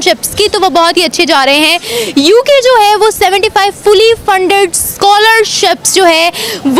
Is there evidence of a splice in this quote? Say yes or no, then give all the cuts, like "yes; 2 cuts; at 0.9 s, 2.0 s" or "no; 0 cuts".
no; 0 cuts